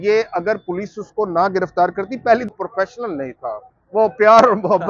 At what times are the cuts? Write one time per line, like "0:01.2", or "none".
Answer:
0:02.5